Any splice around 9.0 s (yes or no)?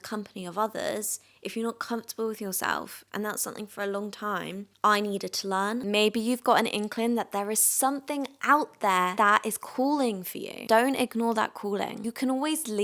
no